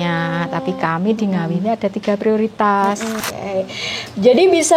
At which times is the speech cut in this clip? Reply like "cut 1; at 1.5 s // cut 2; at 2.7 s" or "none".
cut 1; at 3.2 s

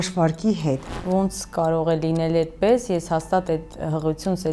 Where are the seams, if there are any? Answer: cut 1; at 0.9 s

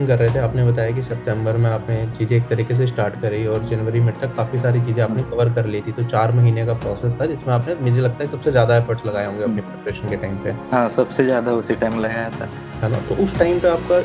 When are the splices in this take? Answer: none

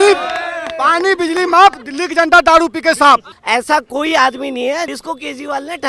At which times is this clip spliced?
cut 1; at 3.3 s // cut 2; at 5.0 s

